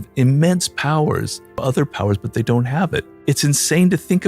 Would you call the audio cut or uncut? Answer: cut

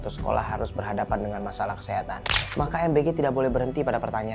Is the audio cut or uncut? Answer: cut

